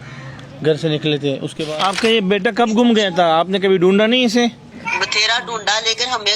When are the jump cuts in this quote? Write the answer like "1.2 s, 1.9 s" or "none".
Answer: 1.5 s, 4.7 s